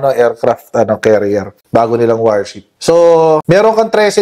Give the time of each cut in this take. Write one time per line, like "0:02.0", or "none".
0:02.7
0:03.4